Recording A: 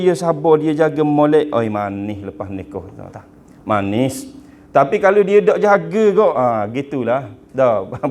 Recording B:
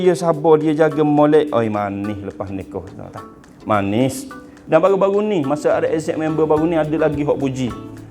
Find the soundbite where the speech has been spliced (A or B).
B